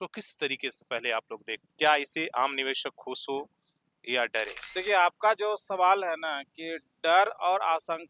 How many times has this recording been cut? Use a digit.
2